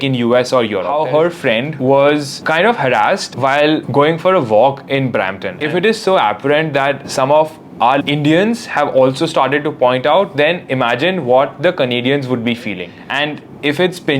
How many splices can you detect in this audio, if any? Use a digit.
3